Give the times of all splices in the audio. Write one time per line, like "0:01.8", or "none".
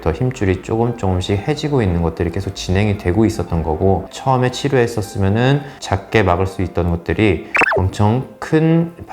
0:04.1